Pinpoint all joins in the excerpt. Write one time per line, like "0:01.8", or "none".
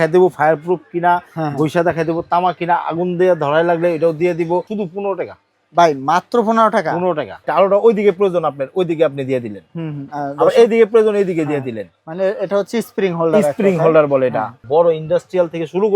0:04.7
0:07.4
0:14.6